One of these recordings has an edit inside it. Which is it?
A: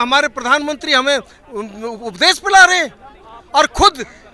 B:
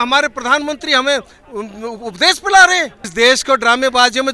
B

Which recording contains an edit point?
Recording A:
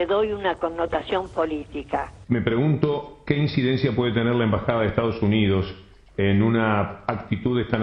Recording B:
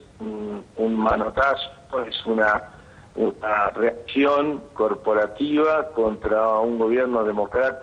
A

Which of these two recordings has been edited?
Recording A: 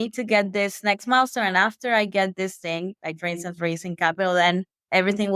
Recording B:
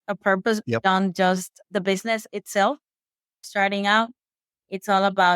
B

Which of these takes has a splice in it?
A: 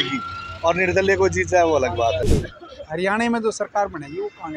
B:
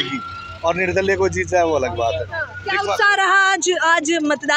A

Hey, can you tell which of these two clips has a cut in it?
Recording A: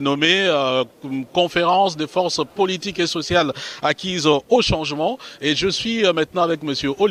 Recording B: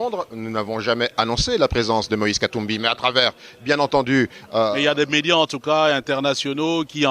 B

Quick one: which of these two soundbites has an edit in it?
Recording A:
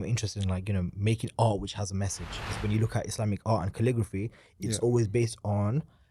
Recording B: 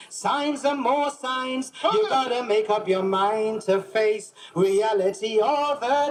A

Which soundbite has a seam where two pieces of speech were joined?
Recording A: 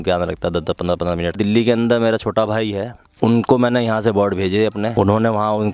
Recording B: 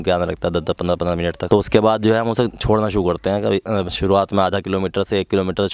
A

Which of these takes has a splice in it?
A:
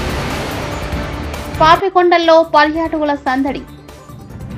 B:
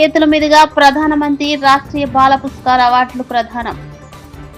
A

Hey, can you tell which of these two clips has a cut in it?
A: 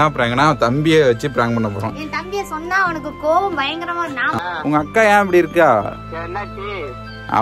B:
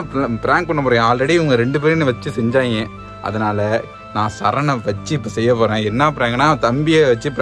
A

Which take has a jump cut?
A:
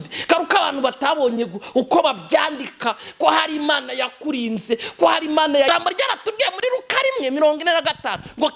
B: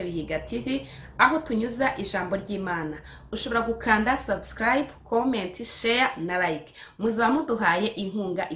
A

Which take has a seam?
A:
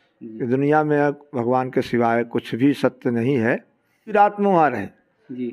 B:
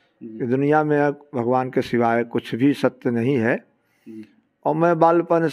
A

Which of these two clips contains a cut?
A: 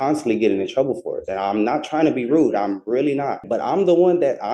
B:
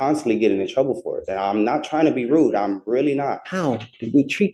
A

